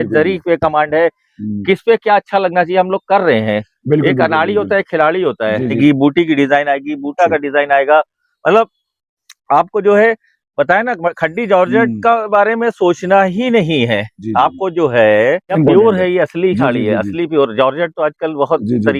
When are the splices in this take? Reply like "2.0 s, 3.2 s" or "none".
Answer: 5.8 s, 15.6 s